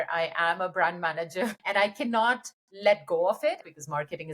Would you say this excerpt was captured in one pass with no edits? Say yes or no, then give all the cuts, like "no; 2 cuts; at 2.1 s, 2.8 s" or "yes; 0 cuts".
no; 2 cuts; at 1.6 s, 3.6 s